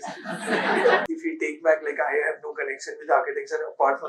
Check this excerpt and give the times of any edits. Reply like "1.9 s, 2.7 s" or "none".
1.0 s